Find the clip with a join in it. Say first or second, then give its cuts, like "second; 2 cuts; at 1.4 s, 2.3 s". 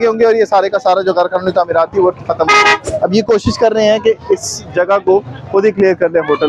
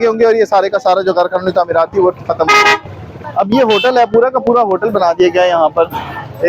first; 1 cut; at 2.9 s